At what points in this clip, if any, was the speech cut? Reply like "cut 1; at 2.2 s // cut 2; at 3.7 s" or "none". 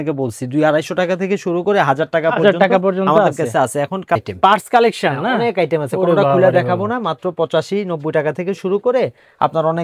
none